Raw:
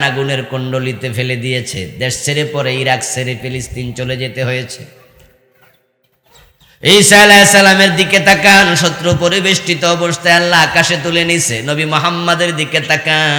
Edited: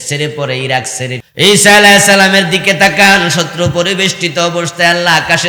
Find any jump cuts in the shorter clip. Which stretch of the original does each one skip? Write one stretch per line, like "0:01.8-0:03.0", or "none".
0:03.4-0:06.7